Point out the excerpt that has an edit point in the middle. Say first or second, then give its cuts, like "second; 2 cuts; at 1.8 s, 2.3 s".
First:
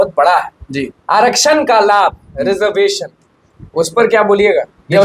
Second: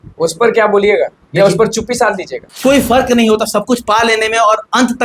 second; 1 cut; at 2.4 s